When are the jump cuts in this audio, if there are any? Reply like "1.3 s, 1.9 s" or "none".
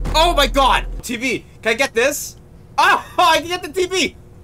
1.1 s